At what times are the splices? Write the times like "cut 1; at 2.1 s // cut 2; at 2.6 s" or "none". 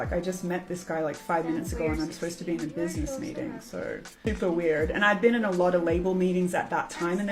cut 1; at 4.2 s